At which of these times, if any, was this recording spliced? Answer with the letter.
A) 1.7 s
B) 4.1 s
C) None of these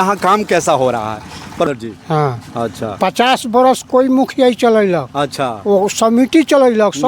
A